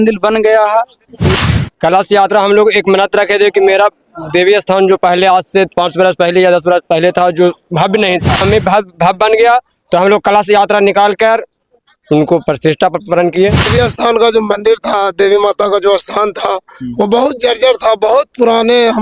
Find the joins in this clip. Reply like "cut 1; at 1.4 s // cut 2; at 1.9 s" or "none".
cut 1; at 1.2 s // cut 2; at 8.4 s // cut 3; at 13.7 s